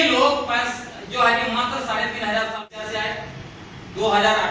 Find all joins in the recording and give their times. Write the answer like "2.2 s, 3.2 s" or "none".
2.7 s